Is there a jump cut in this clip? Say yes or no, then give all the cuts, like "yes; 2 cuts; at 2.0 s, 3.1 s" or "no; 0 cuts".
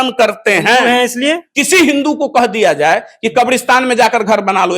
yes; 1 cut; at 1.5 s